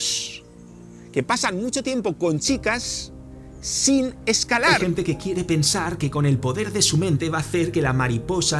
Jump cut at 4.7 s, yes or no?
yes